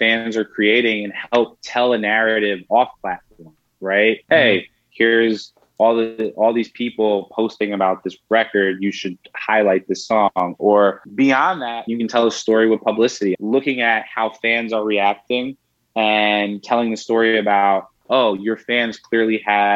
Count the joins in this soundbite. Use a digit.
3